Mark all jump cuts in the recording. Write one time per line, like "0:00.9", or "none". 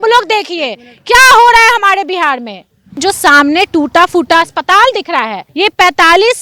0:03.0
0:05.4